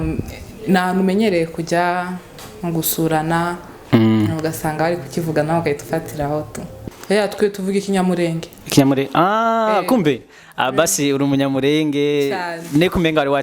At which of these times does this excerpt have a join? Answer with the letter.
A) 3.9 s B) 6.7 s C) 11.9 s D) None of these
B